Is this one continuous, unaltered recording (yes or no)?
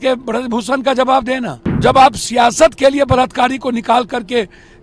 no